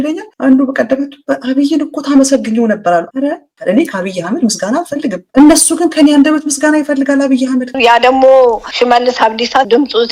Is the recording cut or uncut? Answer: cut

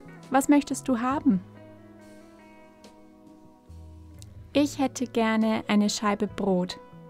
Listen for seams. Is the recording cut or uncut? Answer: uncut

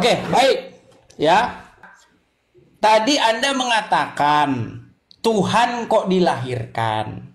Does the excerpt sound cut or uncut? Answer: cut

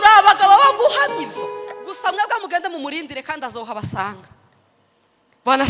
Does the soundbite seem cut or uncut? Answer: cut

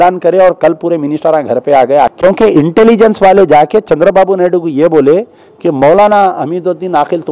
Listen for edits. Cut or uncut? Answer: cut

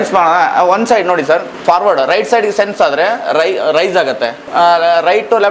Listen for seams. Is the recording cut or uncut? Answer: cut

